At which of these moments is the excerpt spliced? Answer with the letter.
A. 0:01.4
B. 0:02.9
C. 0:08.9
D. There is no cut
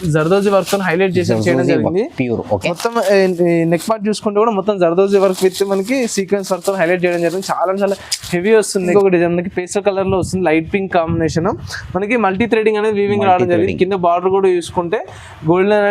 C